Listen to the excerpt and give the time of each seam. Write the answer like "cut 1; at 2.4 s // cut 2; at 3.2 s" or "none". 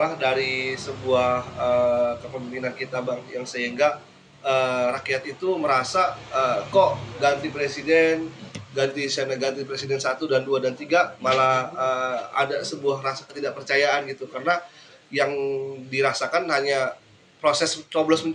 none